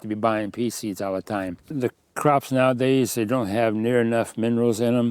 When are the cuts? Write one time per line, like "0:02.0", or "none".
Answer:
0:01.7